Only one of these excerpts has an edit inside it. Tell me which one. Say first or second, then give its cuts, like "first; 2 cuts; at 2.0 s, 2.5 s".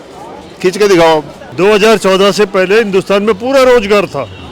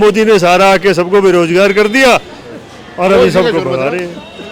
first; 1 cut; at 1.4 s